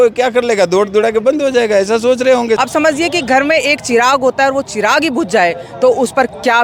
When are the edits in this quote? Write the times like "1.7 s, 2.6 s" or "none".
2.6 s